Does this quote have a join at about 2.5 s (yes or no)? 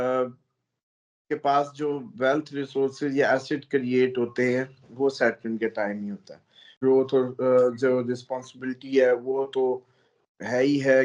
no